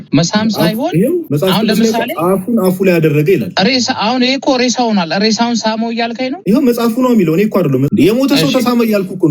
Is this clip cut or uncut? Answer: cut